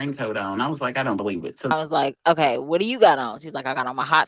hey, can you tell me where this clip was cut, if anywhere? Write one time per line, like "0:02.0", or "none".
0:01.7